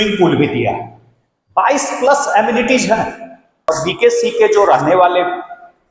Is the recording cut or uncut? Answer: cut